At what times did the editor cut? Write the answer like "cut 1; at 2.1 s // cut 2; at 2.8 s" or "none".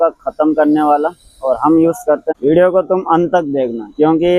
cut 1; at 2.3 s